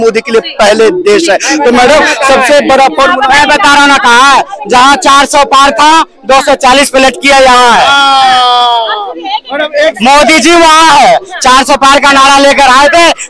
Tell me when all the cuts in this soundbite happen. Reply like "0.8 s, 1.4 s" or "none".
none